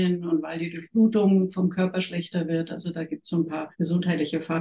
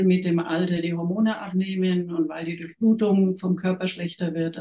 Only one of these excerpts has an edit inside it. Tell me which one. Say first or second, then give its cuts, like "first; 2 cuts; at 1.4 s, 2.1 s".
first; 1 cut; at 3.7 s